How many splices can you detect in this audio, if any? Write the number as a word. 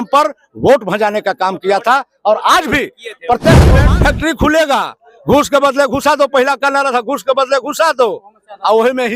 one